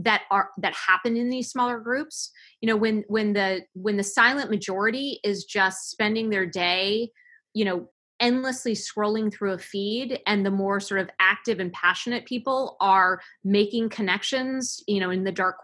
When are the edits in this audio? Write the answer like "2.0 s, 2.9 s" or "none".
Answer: 8.0 s